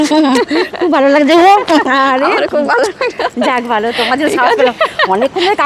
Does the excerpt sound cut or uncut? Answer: uncut